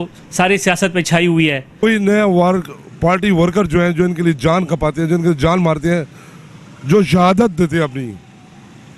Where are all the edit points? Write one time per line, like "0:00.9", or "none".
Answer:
0:01.7